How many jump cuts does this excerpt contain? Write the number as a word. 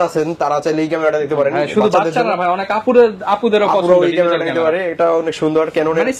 zero